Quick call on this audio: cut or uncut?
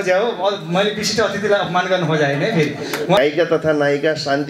cut